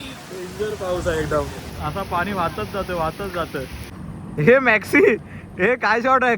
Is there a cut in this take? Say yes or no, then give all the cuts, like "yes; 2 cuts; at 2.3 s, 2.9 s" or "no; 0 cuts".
yes; 1 cut; at 4.2 s